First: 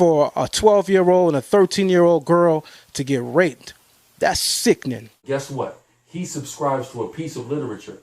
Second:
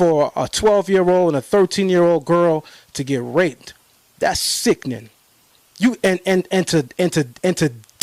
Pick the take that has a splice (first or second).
first